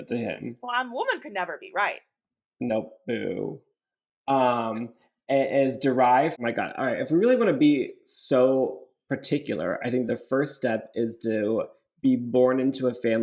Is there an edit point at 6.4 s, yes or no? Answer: yes